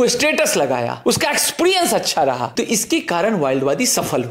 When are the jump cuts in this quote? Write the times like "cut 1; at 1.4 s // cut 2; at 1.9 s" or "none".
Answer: cut 1; at 0.9 s // cut 2; at 2.5 s